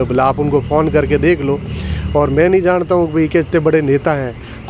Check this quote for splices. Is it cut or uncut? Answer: uncut